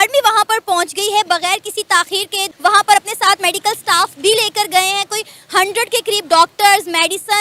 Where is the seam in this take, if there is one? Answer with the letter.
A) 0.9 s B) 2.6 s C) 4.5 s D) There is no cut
D